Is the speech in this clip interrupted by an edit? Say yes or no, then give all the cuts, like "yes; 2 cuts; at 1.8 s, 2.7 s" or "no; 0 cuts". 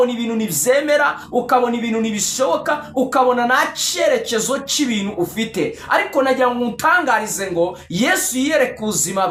no; 0 cuts